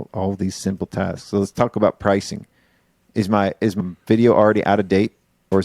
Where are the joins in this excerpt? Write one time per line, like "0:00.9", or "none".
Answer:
none